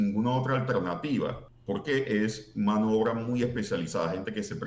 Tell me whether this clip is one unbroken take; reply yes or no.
no